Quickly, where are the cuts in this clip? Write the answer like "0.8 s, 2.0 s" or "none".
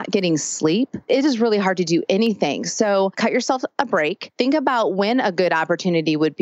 1.0 s, 3.1 s, 4.2 s

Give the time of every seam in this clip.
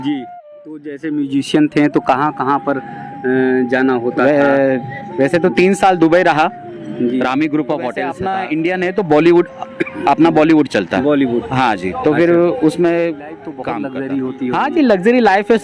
0.9 s, 8.2 s, 13.5 s

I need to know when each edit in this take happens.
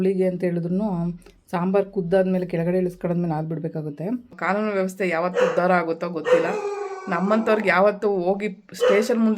4.3 s

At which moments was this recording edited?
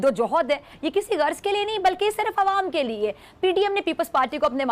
none

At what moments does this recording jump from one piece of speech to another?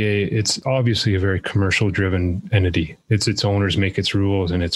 none

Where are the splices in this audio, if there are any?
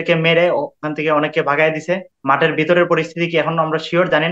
2.1 s

